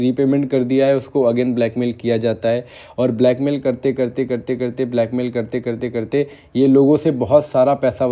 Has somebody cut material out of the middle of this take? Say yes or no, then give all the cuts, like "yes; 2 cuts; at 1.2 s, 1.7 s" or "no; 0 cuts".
no; 0 cuts